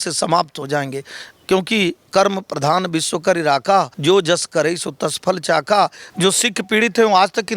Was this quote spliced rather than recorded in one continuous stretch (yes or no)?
yes